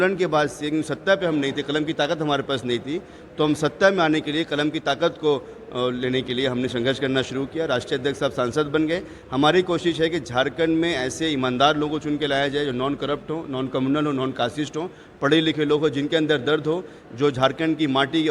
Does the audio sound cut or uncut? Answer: uncut